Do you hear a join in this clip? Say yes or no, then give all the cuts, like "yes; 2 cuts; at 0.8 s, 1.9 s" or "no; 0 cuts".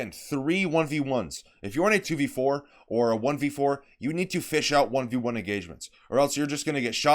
yes; 1 cut; at 2.0 s